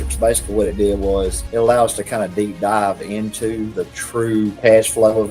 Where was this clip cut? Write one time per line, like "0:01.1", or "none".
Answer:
0:01.4